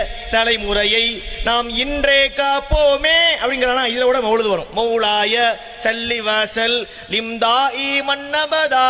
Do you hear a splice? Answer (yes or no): no